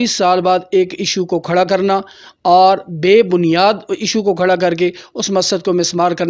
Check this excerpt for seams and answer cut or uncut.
uncut